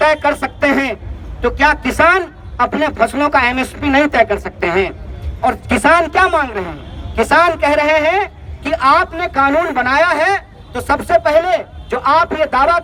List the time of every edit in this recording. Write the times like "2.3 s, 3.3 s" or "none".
none